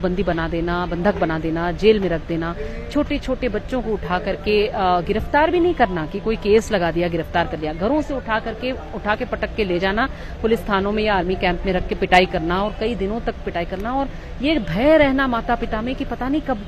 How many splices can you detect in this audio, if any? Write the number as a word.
zero